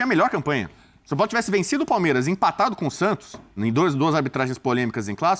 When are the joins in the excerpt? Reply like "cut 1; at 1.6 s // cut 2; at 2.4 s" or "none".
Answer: none